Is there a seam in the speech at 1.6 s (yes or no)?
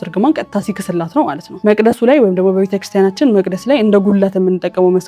yes